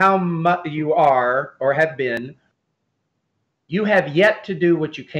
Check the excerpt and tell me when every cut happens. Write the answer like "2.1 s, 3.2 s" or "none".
2.2 s